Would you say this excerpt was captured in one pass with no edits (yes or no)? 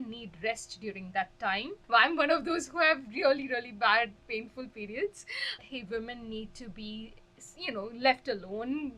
no